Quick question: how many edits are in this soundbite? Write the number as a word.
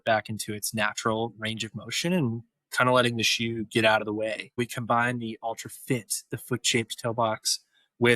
one